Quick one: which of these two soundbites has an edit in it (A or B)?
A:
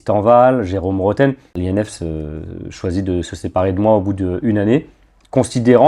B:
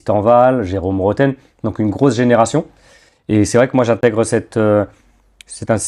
A